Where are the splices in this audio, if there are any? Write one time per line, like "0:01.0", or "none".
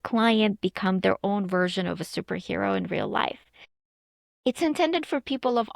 0:03.7